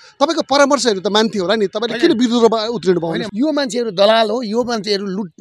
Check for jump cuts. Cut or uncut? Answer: cut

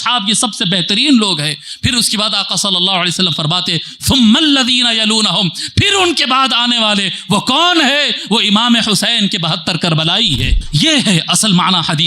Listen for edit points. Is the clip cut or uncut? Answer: cut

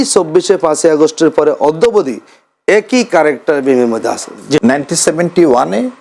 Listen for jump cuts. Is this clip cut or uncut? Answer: cut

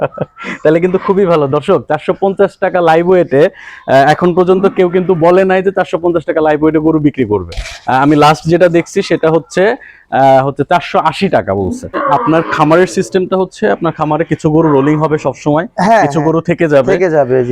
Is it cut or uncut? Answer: cut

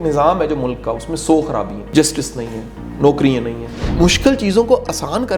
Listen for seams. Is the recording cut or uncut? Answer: cut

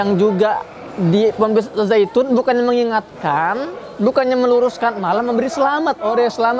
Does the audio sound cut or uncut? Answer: uncut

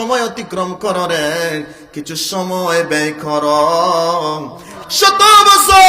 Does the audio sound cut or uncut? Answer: cut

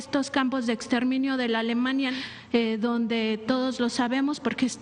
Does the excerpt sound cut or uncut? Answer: cut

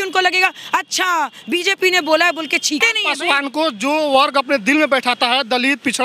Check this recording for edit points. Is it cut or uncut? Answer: cut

